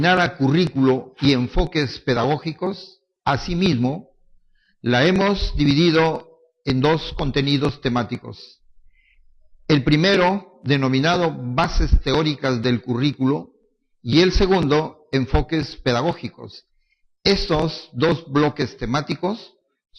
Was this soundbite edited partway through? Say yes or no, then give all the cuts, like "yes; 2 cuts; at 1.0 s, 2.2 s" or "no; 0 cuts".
no; 0 cuts